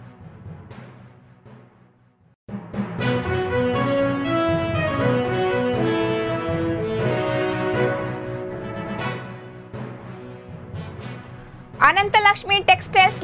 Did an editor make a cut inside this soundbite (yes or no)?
yes